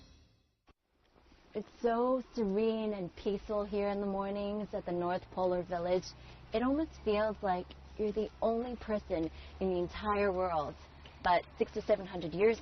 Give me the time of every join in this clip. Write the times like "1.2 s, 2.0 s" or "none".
9.0 s